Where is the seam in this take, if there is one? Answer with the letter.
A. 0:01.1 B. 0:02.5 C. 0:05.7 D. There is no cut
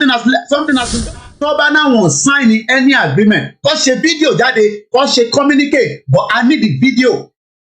A